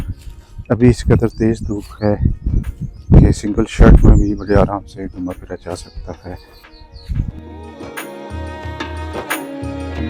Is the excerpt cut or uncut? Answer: uncut